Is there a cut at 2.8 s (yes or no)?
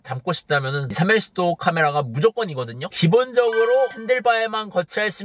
yes